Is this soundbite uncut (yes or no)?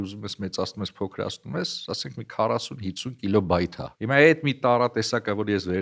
no